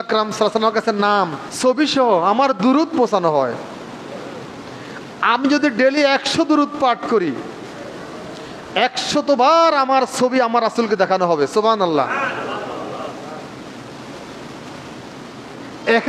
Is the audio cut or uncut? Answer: cut